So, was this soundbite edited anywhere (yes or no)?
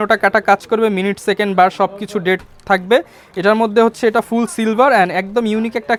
no